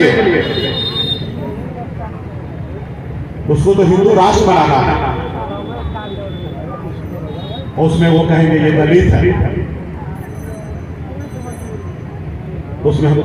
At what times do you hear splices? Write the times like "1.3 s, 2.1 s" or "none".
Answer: none